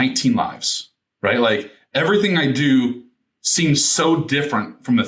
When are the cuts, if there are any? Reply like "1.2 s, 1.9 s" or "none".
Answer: none